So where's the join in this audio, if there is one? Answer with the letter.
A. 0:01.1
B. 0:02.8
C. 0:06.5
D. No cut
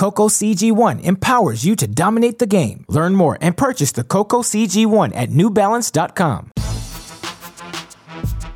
C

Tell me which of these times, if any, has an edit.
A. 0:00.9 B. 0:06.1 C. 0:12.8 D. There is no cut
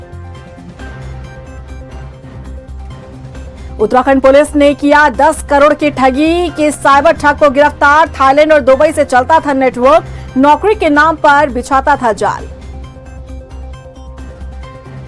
A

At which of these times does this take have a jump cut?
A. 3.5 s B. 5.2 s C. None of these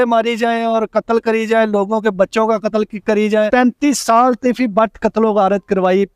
A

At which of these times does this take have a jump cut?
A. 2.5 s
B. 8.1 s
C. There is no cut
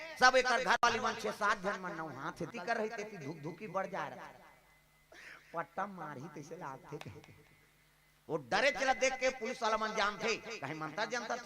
A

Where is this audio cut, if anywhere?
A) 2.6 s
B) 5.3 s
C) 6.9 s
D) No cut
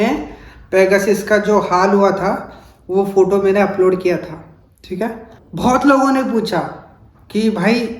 B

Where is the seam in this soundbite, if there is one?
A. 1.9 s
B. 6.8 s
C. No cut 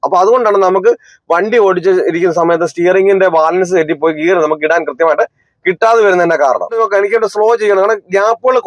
B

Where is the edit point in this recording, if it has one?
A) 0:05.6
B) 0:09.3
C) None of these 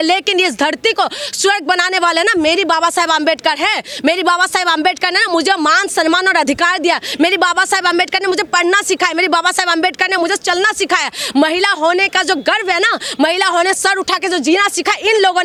C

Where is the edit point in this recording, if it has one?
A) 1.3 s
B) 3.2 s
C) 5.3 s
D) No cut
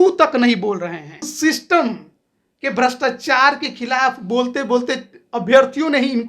A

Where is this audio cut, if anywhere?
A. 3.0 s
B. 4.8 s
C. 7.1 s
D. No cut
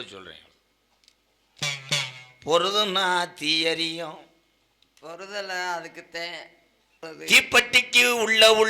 C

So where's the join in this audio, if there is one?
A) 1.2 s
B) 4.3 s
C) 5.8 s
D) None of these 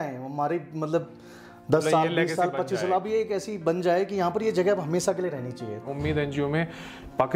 C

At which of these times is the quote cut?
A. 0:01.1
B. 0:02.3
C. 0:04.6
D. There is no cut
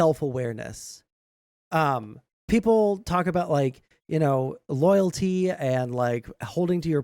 B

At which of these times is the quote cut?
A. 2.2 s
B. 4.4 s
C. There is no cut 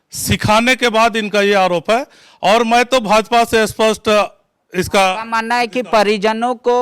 C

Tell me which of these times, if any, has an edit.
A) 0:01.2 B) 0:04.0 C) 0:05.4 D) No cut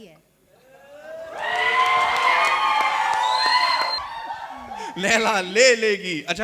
B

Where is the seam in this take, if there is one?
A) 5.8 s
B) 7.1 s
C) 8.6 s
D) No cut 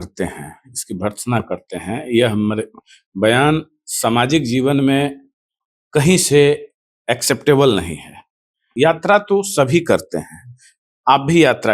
C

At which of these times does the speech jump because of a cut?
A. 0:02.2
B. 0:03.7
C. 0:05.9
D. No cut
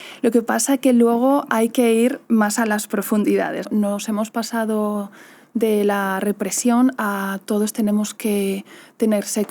B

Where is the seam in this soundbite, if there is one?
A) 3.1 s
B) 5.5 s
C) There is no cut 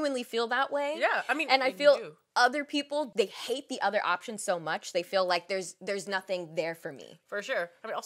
A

